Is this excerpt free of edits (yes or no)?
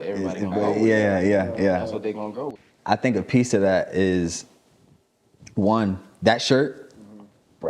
no